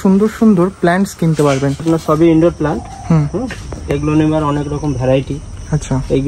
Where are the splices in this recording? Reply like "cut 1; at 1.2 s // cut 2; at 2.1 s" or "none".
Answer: cut 1; at 1.8 s